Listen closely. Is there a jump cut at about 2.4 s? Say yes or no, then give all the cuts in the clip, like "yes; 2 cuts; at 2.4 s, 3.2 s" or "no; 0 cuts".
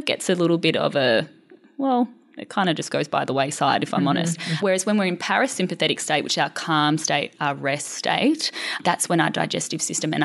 no; 2 cuts; at 4.6 s, 8.8 s